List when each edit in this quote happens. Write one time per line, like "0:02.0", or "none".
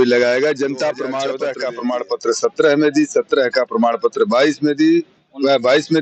0:01.3